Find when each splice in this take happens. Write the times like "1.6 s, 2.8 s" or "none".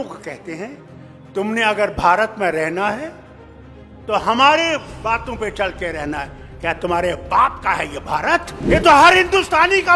8.7 s